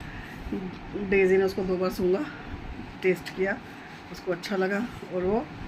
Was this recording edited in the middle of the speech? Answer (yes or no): no